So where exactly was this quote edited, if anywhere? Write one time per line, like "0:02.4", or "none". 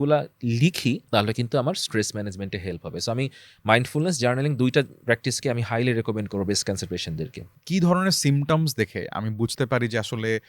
0:01.0
0:07.6